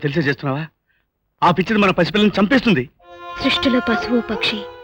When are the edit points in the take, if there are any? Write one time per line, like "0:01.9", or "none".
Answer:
none